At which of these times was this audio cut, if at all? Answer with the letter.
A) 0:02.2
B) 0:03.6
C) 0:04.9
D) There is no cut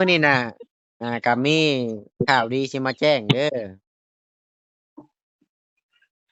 D